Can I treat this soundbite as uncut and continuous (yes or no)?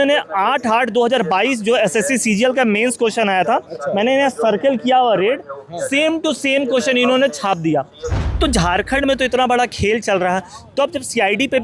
no